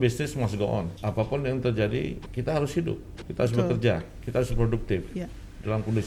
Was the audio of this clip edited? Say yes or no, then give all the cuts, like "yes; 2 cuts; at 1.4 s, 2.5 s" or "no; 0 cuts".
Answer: yes; 4 cuts; at 0.9 s, 2.3 s, 3.2 s, 4.2 s